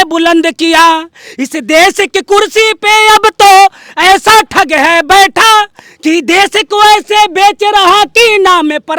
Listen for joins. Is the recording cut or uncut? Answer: uncut